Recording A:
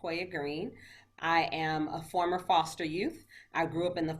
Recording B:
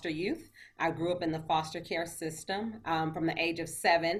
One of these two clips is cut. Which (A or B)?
A